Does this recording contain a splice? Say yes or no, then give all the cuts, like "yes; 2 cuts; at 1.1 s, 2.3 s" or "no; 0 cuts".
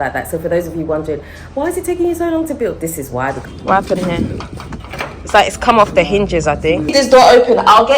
yes; 2 cuts; at 3.4 s, 6.8 s